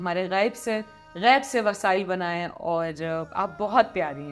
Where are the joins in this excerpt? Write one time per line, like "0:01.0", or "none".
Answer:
none

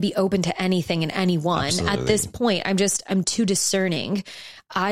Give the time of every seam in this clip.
none

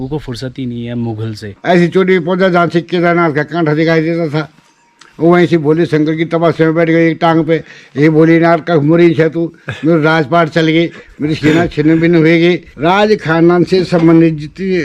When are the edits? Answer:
0:01.5
0:12.7

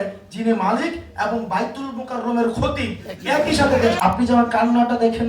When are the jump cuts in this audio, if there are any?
0:04.0

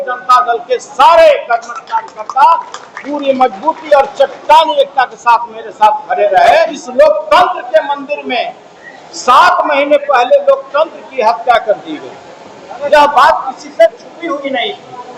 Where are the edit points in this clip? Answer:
0:06.8

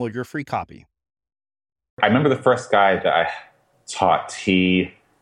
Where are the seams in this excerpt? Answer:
0:02.0

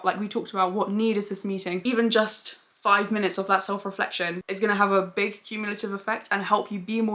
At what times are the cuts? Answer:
0:01.8

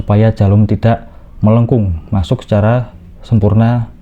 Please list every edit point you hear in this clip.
0:01.6

